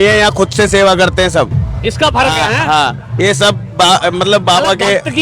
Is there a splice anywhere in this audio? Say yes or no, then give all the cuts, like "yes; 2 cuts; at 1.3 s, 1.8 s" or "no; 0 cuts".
no; 0 cuts